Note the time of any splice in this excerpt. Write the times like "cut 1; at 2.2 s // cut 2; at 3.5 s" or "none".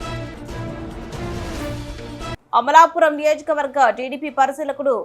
cut 1; at 2.4 s